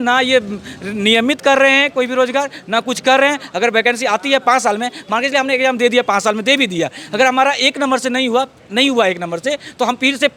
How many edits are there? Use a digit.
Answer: 0